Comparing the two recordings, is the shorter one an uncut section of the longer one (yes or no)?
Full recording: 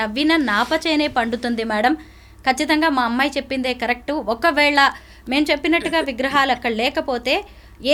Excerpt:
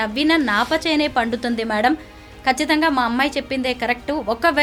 yes